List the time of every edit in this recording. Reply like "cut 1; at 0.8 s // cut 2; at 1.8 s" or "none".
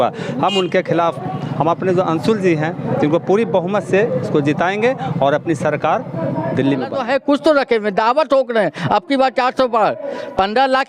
cut 1; at 7.0 s